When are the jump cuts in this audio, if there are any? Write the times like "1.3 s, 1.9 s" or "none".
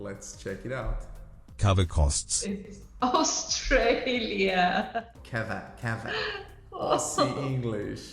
5.1 s